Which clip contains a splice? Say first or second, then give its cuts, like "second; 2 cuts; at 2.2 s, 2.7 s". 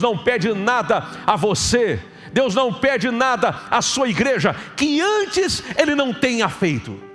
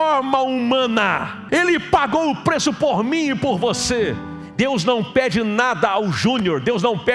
second; 2 cuts; at 1.3 s, 4.4 s